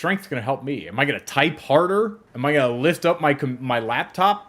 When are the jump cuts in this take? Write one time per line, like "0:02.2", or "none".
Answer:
0:02.2